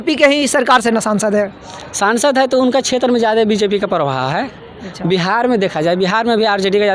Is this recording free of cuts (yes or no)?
yes